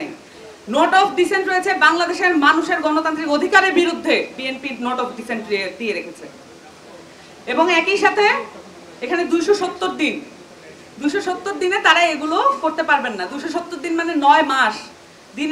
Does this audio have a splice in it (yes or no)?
no